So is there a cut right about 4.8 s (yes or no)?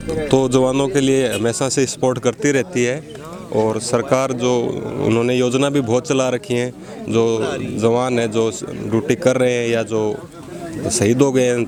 no